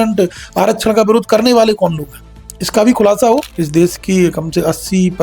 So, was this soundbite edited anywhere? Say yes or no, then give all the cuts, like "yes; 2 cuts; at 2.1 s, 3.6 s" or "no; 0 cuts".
yes; 1 cut; at 3.6 s